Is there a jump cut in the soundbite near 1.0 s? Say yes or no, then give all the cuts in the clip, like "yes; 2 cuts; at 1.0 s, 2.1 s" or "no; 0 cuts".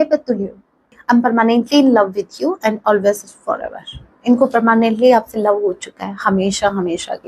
yes; 1 cut; at 1.0 s